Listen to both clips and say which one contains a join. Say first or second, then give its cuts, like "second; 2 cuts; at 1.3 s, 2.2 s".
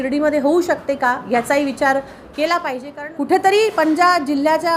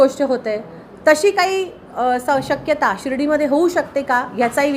first; 1 cut; at 2.9 s